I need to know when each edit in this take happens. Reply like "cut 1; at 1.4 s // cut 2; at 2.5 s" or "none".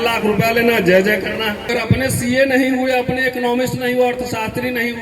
cut 1; at 1.7 s